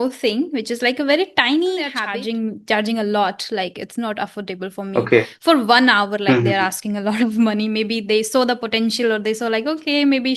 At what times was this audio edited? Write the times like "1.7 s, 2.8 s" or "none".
2.0 s